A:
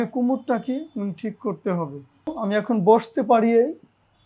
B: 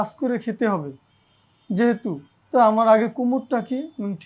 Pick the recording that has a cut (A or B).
A